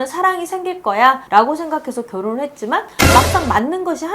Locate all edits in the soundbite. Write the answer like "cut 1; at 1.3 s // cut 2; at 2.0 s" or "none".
cut 1; at 1.2 s

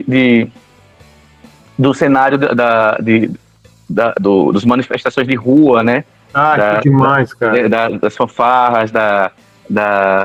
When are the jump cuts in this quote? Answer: none

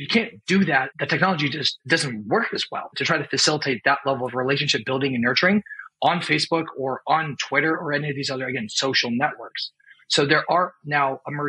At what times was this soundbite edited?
cut 1; at 0.9 s // cut 2; at 1.7 s // cut 3; at 3.0 s

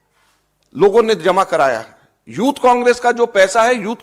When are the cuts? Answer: none

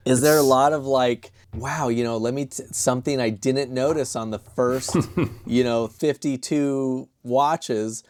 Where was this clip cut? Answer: none

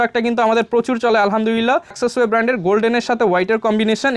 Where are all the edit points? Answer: cut 1; at 1.9 s

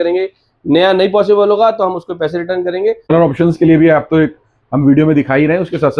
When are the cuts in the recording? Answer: cut 1; at 3.1 s

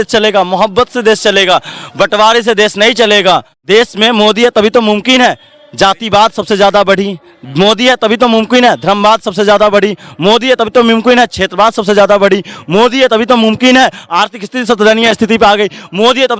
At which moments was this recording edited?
cut 1; at 3.5 s

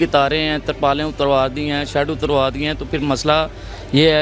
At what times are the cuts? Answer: none

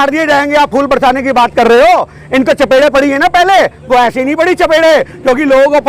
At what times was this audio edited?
none

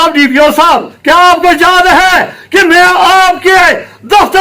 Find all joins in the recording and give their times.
cut 1; at 0.9 s

